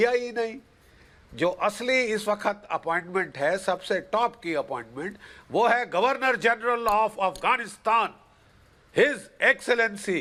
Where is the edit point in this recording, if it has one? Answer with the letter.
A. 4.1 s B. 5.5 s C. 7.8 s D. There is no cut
D